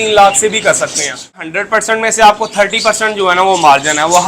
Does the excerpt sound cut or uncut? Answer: cut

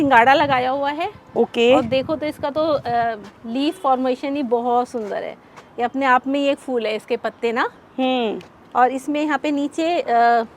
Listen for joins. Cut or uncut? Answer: uncut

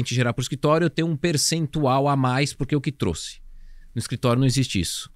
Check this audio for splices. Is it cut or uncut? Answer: uncut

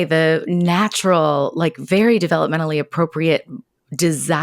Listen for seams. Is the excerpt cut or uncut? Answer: uncut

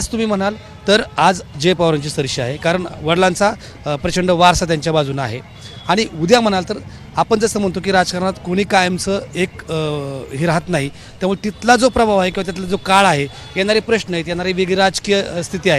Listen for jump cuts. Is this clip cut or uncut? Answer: uncut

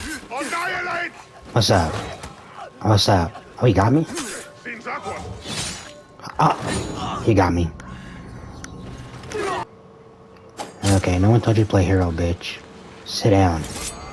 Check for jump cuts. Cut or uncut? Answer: cut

